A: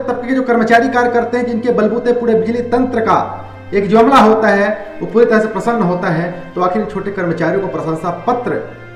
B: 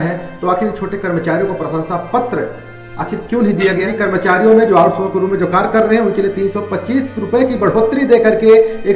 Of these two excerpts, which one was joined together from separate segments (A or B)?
B